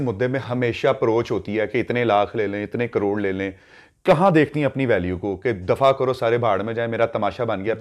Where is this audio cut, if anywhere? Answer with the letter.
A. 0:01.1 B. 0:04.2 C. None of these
C